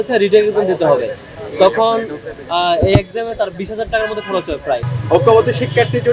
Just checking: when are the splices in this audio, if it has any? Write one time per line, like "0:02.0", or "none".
0:04.8